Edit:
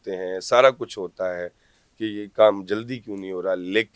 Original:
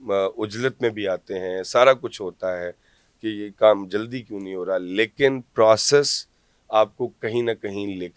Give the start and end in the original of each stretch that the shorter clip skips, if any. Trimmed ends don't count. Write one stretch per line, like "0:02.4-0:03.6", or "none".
none